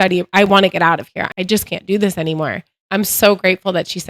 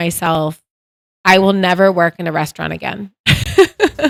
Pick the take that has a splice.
first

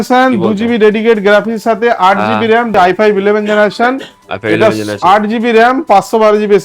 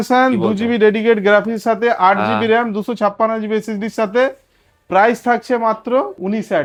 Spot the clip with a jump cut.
first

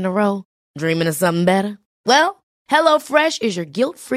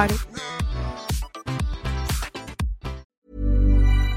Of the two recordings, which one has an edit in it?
second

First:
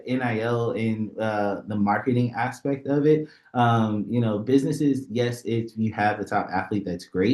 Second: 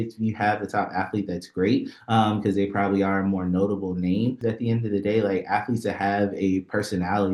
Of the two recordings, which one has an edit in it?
second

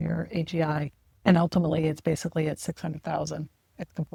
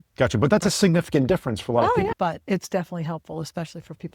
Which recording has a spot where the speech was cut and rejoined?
second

